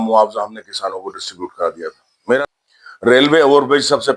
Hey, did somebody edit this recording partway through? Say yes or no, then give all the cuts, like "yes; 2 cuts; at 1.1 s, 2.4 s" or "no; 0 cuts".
yes; 1 cut; at 2.4 s